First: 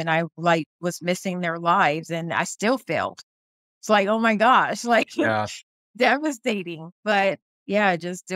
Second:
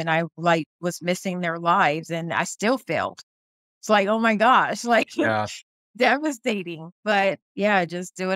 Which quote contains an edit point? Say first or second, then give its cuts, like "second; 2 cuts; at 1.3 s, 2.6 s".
second; 1 cut; at 7.5 s